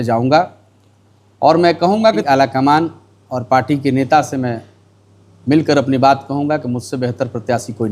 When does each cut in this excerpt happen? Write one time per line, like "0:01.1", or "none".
0:02.2

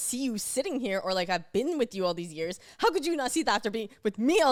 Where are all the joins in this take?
none

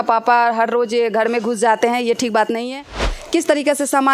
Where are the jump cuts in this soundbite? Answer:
0:03.1

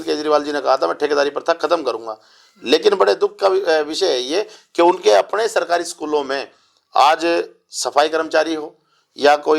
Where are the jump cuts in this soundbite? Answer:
none

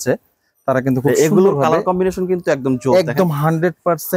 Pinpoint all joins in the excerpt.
none

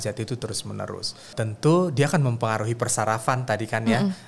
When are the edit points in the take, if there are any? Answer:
0:01.3

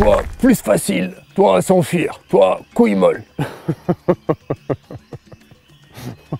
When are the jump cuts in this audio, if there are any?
none

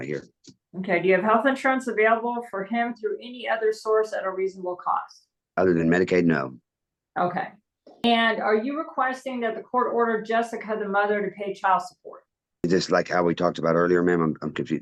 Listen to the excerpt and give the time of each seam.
none

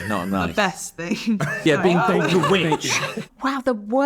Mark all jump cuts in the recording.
0:01.6
0:03.1

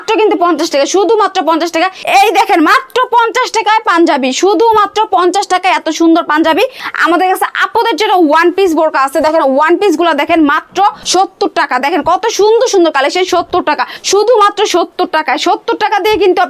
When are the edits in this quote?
0:02.0
0:06.8
0:11.0
0:13.9

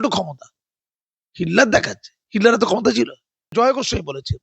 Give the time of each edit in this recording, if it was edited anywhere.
0:03.5

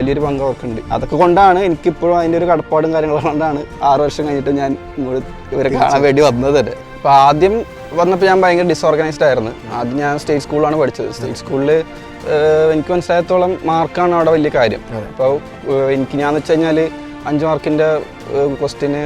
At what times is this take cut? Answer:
0:06.8

